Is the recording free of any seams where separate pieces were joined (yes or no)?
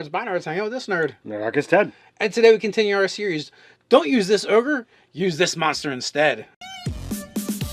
yes